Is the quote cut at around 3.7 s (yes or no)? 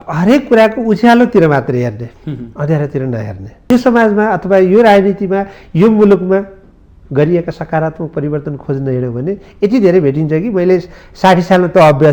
yes